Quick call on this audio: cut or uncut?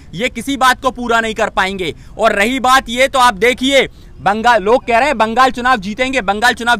uncut